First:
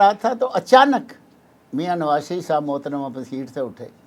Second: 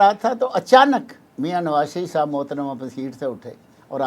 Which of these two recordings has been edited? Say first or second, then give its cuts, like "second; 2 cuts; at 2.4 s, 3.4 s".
second; 1 cut; at 1.2 s